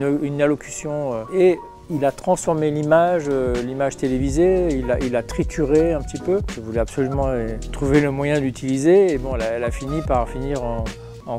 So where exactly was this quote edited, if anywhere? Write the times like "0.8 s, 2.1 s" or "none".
1.3 s, 6.5 s, 7.6 s